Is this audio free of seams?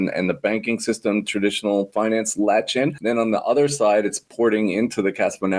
yes; 0 cuts

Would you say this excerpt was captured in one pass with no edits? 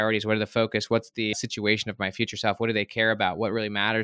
no; 1 cut; at 1.3 s

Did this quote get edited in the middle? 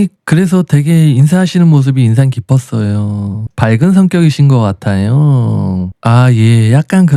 no; 0 cuts

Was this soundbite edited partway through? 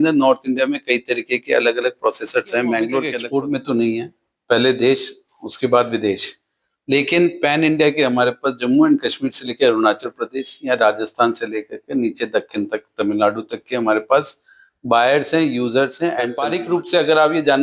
yes; 2 cuts; at 3.2 s, 16.4 s

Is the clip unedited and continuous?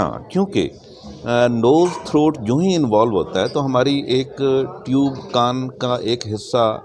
yes; 0 cuts

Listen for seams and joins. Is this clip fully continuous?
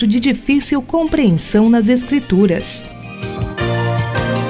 no; 1 cut; at 2.8 s

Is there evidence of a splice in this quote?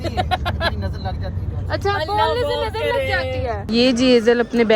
yes; 1 cut; at 3.6 s

